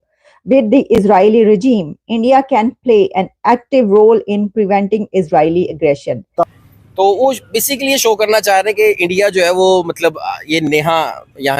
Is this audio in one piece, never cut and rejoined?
no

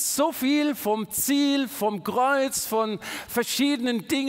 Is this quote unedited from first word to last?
yes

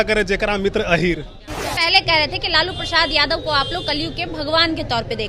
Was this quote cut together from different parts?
yes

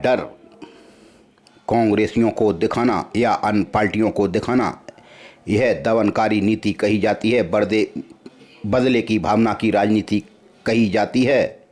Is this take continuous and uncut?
yes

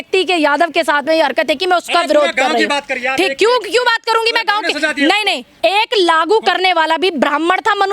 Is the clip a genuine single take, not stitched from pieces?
no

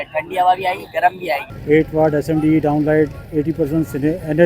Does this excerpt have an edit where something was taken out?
yes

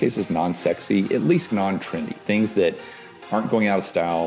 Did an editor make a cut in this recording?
no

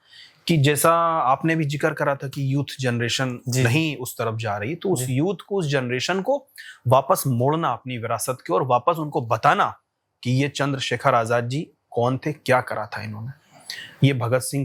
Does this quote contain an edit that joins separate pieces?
no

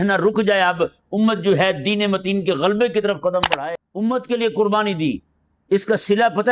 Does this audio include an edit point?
yes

